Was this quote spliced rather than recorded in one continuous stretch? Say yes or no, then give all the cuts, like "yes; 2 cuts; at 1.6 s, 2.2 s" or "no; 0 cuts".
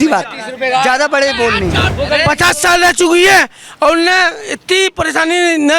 yes; 1 cut; at 1.8 s